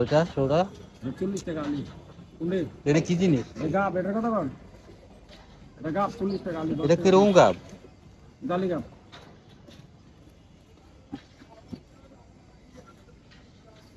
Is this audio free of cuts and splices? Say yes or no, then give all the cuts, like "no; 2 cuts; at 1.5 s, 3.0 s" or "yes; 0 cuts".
yes; 0 cuts